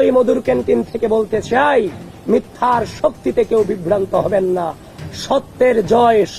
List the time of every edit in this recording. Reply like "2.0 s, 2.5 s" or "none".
none